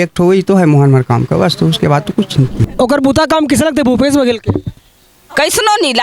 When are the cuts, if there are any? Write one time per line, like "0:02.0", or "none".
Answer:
0:02.6